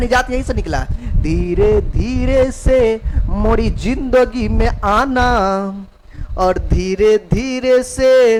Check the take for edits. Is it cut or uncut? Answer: uncut